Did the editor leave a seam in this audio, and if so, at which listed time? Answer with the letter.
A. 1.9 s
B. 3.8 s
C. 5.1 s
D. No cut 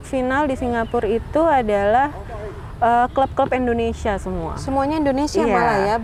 D